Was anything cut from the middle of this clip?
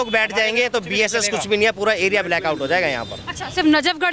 no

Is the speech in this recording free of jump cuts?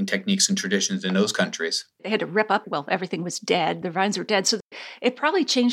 no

